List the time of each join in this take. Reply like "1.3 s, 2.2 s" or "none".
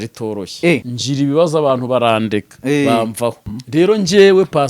0.9 s, 3.5 s